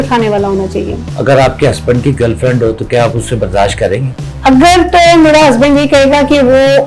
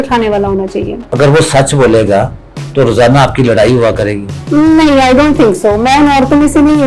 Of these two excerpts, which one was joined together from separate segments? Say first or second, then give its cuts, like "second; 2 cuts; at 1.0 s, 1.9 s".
first; 1 cut; at 1.0 s